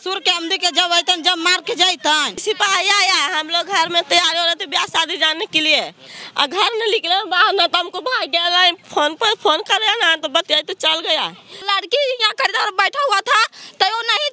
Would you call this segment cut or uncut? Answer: cut